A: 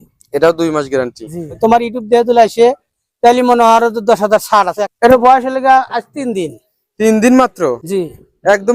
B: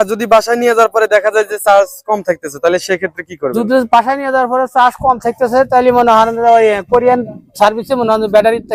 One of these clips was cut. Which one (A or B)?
A